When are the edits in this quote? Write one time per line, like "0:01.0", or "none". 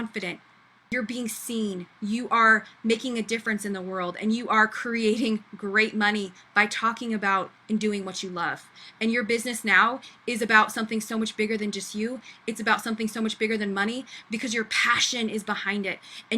0:00.9